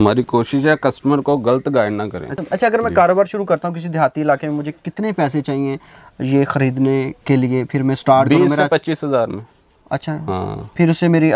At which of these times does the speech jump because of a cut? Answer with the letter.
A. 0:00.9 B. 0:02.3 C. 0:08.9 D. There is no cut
B